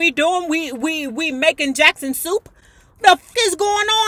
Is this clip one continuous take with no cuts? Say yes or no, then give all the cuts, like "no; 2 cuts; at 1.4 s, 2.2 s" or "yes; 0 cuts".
yes; 0 cuts